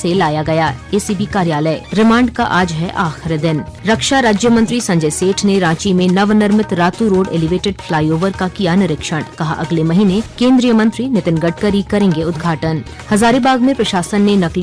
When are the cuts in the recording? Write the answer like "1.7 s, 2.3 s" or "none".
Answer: 1.8 s, 3.7 s, 10.3 s, 12.9 s